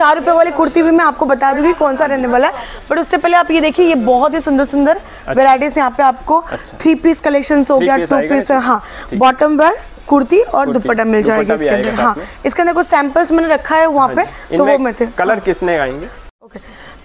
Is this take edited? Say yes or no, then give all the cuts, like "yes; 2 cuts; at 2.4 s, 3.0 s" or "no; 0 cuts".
no; 0 cuts